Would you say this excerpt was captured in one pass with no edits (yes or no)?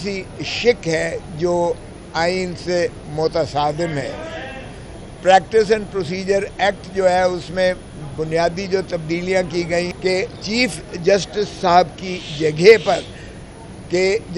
no